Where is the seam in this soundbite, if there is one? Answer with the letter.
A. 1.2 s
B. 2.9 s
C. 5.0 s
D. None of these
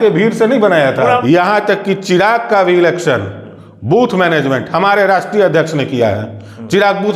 A